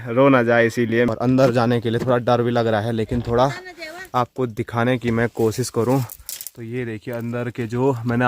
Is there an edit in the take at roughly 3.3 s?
no; 1 cut; at 1.1 s

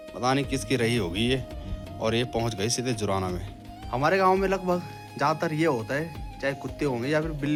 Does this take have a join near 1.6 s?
no; 0 cuts

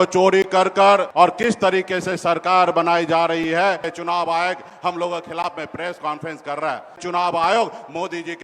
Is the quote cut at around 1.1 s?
yes; 3 cuts; at 1.1 s, 3.9 s, 7.0 s

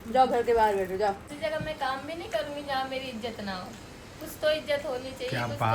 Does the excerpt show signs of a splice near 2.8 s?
no; 1 cut; at 1.3 s

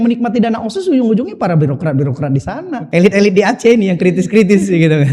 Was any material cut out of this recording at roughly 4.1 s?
no; 1 cut; at 2.7 s

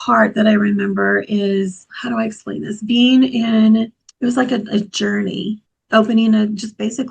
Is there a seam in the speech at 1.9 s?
yes; 3 cuts; at 1.9 s, 4.0 s, 5.7 s

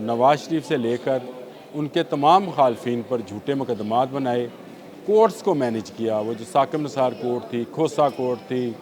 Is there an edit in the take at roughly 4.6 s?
no; 0 cuts

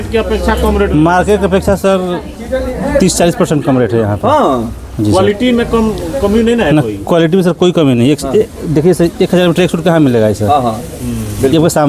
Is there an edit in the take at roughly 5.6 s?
no; 0 cuts

